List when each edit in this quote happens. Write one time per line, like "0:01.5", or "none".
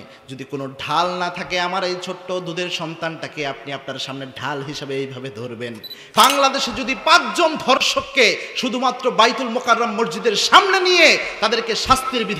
0:06.0